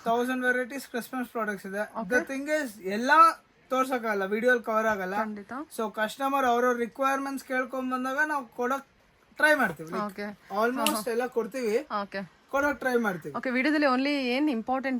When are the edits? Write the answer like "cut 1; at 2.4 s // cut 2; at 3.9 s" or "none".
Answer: none